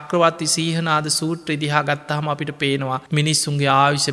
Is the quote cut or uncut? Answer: cut